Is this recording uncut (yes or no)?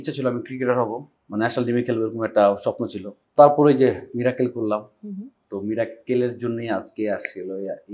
no